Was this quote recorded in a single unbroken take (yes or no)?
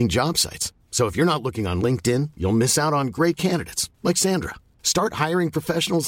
yes